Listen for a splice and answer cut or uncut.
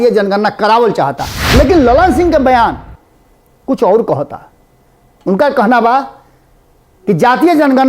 cut